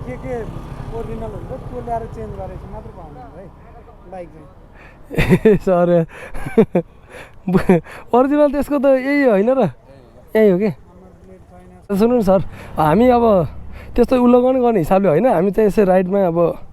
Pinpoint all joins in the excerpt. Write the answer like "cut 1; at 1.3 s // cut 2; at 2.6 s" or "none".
cut 1; at 11.9 s